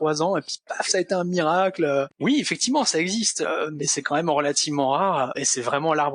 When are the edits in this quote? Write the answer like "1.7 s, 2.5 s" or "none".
2.1 s, 5.3 s